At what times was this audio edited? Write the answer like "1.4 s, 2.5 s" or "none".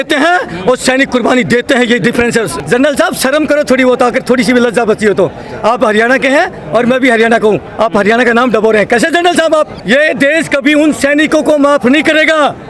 2.6 s, 9.8 s